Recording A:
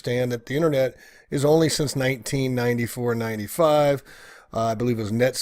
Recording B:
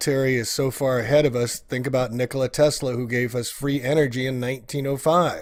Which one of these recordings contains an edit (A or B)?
A